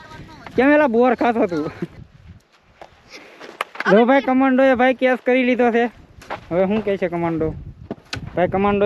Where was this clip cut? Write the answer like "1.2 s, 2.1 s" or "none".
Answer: 2.0 s